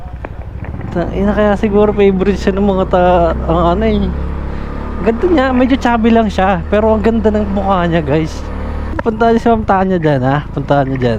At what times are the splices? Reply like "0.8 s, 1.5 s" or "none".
none